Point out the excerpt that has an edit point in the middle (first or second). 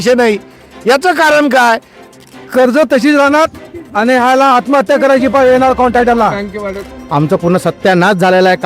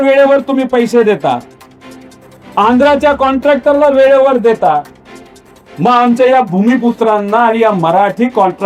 first